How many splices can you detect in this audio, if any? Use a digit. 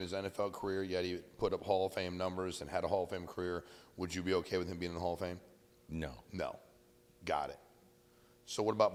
0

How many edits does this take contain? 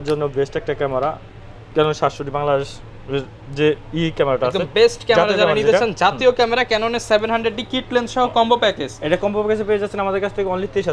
0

